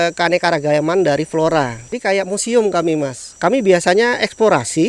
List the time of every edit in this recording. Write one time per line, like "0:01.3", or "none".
0:01.9
0:03.2